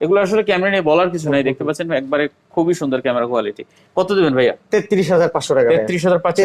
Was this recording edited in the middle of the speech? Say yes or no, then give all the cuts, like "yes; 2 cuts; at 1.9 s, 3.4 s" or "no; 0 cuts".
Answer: no; 0 cuts